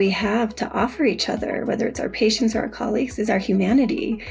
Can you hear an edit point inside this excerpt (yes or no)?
no